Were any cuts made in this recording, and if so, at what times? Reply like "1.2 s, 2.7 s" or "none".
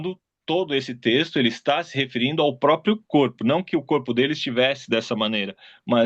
none